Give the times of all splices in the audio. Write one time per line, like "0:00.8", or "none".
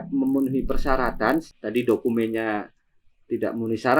0:01.5